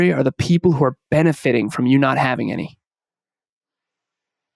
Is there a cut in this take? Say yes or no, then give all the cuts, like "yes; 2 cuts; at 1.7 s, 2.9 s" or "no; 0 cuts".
no; 0 cuts